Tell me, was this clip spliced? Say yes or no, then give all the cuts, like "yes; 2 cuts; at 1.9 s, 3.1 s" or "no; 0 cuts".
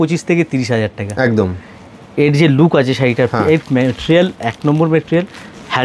no; 0 cuts